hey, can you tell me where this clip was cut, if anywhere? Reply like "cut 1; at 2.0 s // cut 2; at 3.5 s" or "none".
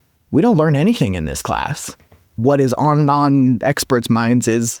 cut 1; at 2.4 s